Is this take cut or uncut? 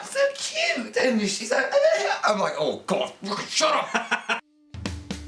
cut